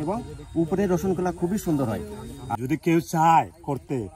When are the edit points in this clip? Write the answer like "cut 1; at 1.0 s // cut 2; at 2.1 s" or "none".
cut 1; at 2.5 s